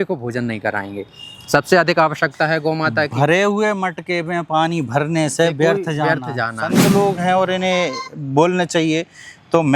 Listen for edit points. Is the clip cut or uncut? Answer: cut